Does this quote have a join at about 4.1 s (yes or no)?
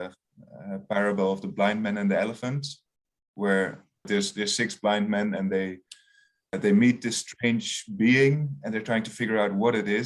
yes